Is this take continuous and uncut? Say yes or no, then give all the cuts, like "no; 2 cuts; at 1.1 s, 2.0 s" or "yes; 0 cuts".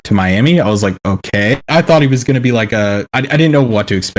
no; 1 cut; at 1.6 s